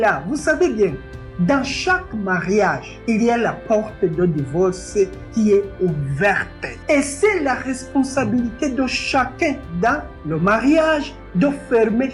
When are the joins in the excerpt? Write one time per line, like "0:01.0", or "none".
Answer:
none